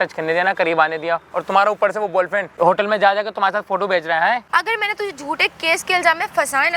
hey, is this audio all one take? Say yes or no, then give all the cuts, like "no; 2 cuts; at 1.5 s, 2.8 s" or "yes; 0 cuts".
no; 2 cuts; at 2.5 s, 4.5 s